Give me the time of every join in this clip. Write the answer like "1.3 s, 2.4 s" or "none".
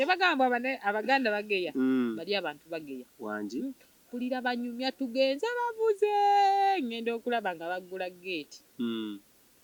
none